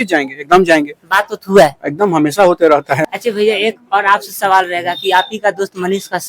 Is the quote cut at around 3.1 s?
yes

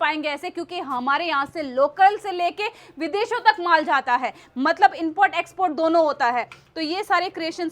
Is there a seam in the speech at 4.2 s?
no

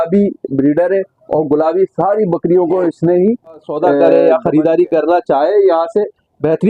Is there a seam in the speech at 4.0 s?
yes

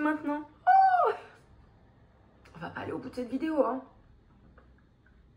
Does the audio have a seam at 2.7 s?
no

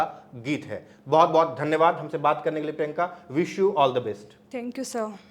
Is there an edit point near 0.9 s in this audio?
no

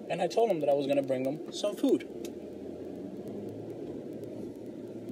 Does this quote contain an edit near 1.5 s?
yes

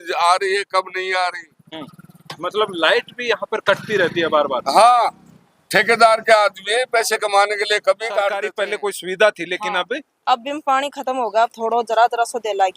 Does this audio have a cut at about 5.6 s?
no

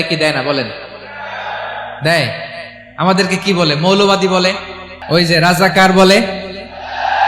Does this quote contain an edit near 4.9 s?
yes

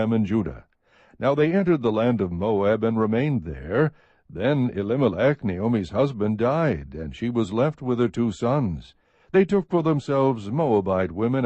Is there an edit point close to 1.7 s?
yes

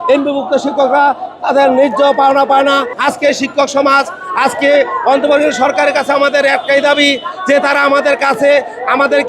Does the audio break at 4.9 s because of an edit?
no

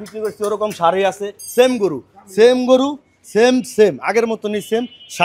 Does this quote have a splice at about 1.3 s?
yes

